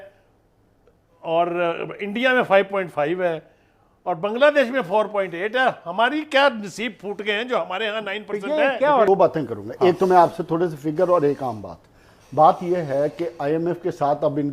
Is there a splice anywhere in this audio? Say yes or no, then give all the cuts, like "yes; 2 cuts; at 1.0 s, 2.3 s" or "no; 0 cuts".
yes; 1 cut; at 9.1 s